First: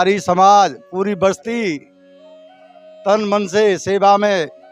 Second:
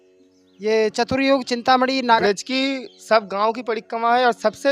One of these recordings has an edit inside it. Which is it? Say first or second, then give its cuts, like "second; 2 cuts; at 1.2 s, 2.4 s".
second; 1 cut; at 2.2 s